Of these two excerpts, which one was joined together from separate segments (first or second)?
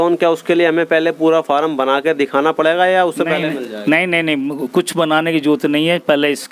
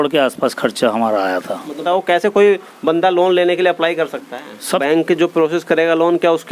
second